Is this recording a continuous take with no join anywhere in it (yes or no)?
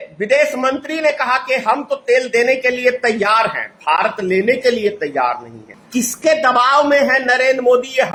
yes